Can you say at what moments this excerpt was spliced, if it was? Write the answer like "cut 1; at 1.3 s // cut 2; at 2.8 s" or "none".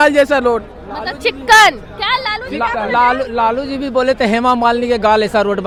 none